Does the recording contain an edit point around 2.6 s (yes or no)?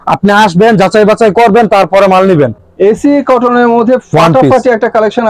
yes